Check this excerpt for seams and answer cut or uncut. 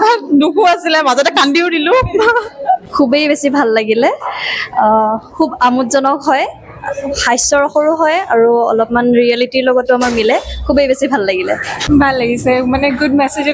cut